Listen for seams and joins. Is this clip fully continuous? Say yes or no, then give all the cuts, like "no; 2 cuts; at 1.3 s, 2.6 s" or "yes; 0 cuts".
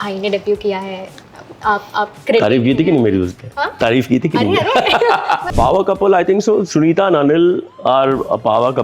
no; 1 cut; at 5.5 s